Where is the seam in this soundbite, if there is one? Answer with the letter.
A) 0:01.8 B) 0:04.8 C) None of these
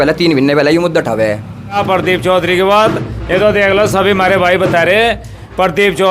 A